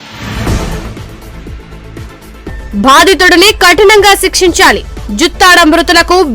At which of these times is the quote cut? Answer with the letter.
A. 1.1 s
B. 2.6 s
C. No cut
B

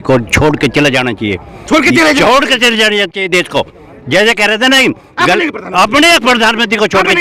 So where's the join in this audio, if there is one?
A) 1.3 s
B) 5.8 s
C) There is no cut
C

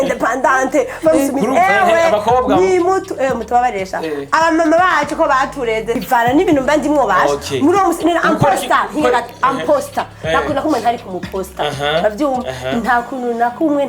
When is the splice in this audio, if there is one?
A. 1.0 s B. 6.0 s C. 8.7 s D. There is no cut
B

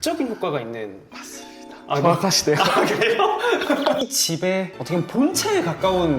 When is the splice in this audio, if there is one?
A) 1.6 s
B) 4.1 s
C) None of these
B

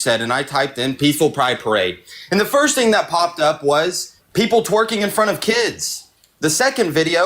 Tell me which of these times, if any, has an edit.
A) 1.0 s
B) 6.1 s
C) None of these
A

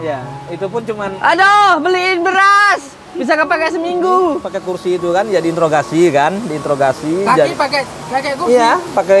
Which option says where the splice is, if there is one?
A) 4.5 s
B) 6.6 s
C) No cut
A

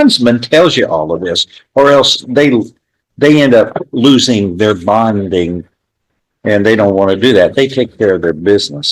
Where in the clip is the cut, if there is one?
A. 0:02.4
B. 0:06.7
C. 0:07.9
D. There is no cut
D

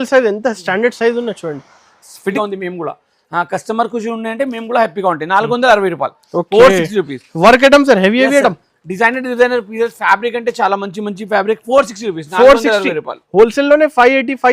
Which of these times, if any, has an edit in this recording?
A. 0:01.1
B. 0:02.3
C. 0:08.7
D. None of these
B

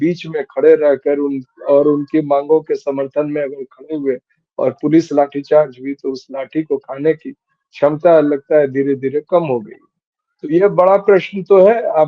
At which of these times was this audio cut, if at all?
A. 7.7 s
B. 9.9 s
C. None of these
C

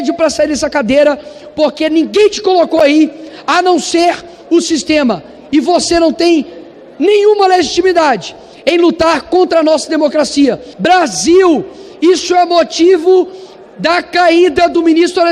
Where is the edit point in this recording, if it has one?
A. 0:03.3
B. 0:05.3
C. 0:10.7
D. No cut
C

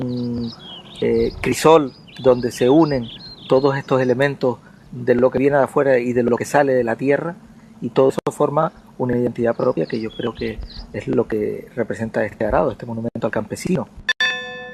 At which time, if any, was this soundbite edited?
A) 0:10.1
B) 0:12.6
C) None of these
A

